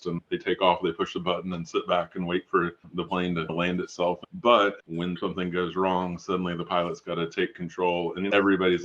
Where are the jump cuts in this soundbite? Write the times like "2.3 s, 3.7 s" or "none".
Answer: 4.2 s, 5.2 s